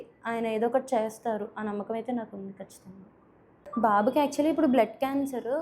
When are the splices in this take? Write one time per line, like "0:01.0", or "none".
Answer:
0:03.4